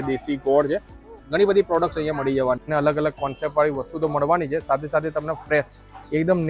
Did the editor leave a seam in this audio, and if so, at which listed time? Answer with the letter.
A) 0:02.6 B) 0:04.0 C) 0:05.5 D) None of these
A